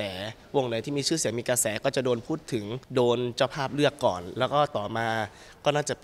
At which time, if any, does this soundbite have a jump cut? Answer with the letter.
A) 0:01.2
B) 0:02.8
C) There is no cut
B